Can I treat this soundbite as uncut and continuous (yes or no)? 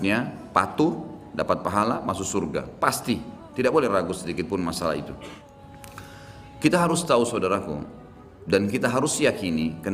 no